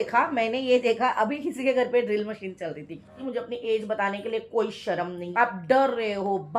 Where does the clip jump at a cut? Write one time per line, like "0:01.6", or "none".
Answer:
0:03.2
0:05.2